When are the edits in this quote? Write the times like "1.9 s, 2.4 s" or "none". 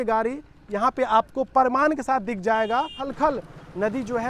3.0 s

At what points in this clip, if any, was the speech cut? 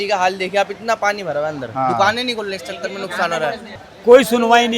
3.8 s

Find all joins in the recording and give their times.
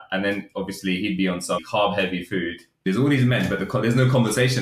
1.7 s, 2.8 s

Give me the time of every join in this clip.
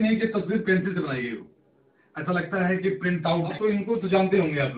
3.5 s

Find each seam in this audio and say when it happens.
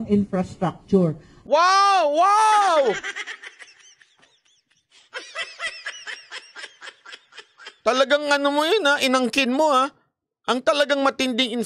none

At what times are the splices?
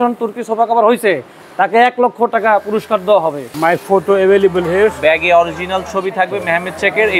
3.5 s

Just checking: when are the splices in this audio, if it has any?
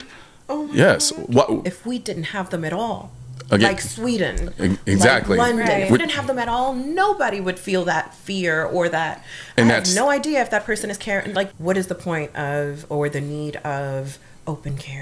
1.7 s, 11.5 s

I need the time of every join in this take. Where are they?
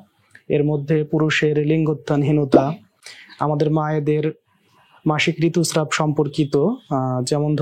none

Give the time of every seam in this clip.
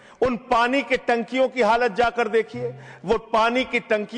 none

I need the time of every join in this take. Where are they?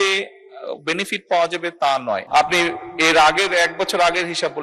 2.2 s

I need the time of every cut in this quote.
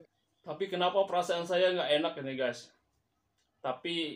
none

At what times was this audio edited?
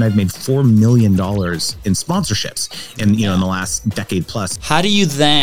2.0 s, 4.4 s

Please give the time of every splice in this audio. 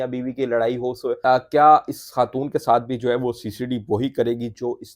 1.2 s

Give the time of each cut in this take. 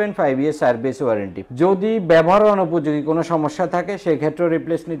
1.4 s

